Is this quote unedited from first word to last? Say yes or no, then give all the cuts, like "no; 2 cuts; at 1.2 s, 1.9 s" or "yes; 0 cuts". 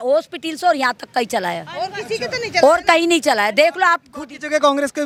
yes; 0 cuts